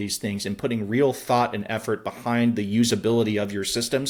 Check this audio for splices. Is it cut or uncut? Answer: uncut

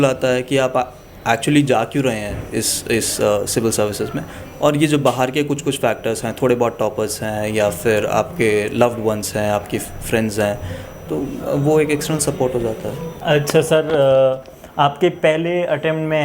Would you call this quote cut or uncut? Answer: uncut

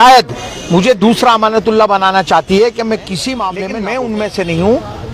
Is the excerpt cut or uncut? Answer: cut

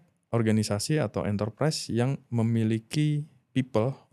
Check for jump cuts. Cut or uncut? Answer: uncut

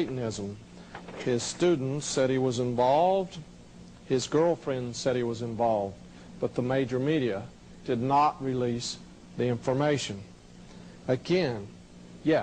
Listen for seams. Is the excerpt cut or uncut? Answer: cut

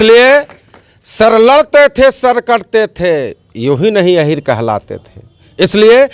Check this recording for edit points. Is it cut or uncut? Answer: uncut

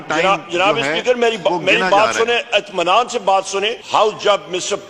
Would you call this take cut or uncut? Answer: cut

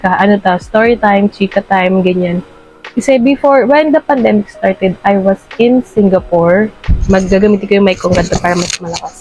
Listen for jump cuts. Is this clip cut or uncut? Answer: uncut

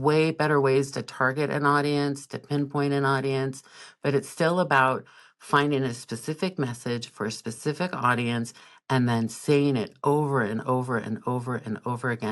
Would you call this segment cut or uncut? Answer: uncut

